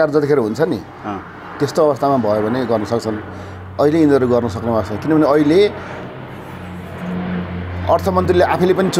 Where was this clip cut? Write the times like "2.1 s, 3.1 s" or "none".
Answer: none